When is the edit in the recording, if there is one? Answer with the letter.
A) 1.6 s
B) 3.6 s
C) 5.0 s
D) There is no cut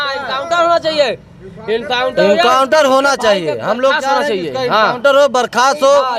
D